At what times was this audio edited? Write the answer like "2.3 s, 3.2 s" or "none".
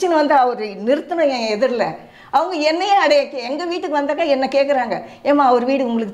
none